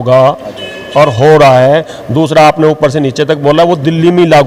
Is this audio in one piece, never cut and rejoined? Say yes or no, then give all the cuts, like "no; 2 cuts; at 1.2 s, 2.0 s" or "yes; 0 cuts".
yes; 0 cuts